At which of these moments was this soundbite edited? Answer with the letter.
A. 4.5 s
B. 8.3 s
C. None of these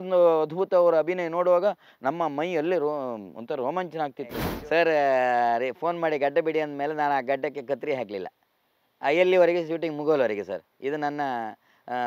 A